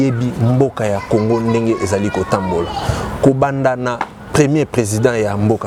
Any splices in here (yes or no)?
no